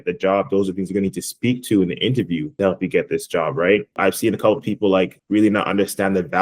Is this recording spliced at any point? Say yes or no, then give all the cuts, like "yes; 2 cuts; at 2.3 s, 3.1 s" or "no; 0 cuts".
yes; 2 cuts; at 2.5 s, 3.9 s